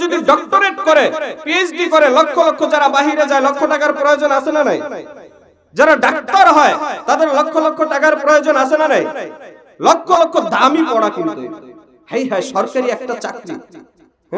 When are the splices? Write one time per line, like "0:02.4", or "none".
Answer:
none